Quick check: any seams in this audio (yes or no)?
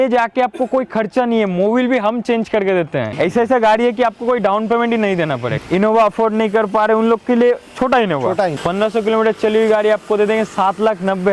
yes